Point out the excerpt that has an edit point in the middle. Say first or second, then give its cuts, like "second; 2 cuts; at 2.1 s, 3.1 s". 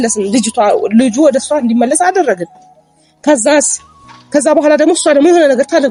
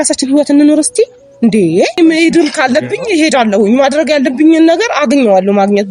second; 1 cut; at 2.2 s